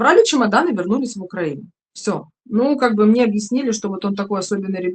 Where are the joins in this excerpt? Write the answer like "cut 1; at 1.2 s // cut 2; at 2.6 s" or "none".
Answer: cut 1; at 2.3 s